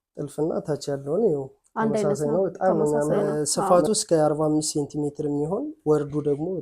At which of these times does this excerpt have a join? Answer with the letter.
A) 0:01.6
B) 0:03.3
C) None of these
B